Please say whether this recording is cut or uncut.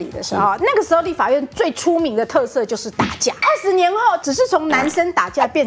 cut